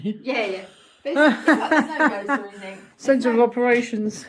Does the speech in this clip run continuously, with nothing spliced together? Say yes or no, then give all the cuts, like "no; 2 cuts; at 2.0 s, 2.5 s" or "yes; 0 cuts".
yes; 0 cuts